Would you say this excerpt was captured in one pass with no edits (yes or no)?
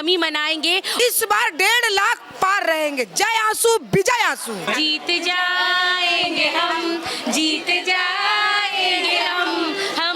no